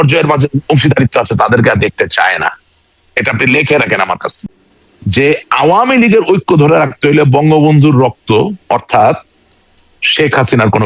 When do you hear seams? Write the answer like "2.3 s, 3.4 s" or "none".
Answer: 4.3 s

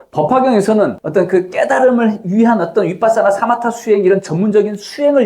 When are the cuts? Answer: 1.0 s

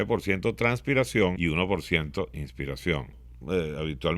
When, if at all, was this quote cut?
1.4 s, 3.3 s

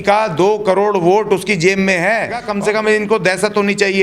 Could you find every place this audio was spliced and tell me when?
2.4 s

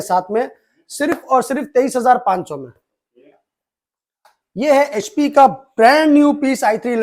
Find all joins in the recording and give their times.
none

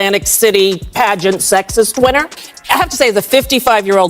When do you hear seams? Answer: 2.6 s

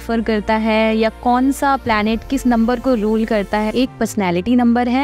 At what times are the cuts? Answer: 3.7 s

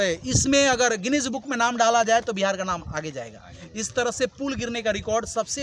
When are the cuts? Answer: none

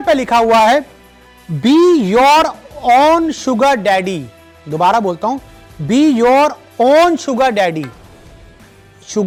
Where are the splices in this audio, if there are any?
none

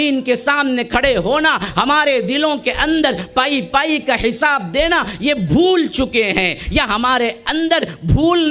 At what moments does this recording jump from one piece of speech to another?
none

